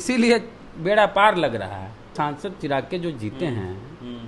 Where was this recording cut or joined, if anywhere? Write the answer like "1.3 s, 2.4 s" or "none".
2.1 s